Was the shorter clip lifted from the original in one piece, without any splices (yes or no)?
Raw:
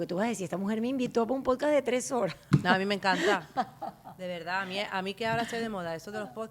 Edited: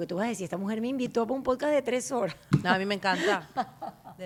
yes